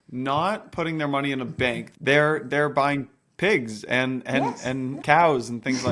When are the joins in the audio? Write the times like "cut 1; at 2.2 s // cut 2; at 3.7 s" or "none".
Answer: cut 1; at 1.9 s // cut 2; at 5.0 s